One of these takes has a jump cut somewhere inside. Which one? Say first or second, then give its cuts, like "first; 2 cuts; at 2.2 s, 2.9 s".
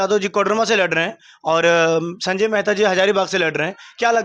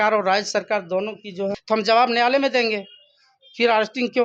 second; 1 cut; at 1.6 s